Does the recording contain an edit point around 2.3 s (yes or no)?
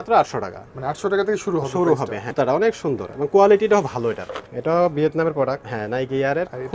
yes